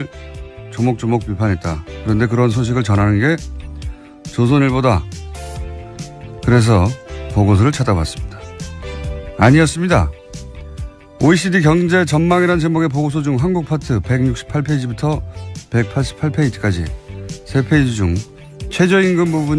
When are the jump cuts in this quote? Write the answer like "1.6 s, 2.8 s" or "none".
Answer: 16.1 s